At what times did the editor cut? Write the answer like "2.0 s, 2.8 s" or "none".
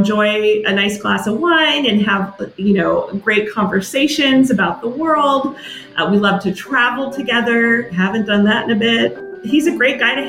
9.2 s